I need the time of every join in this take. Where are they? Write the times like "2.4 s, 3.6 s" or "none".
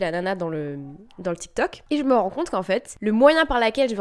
1.8 s, 2.9 s